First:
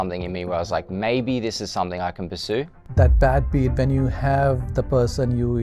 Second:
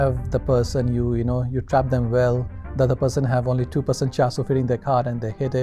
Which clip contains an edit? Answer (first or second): first